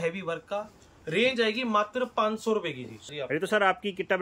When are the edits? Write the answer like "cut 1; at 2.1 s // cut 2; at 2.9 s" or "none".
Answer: cut 1; at 3.0 s